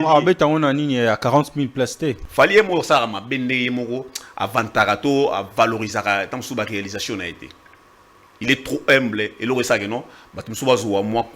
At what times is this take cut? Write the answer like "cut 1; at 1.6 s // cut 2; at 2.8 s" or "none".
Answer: cut 1; at 2.2 s